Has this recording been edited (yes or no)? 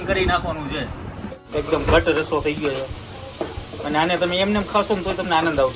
yes